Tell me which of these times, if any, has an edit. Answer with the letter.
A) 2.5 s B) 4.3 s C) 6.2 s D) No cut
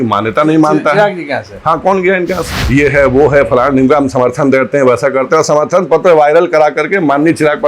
A